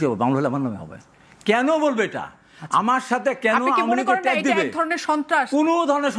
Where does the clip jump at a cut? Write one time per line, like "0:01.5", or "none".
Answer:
none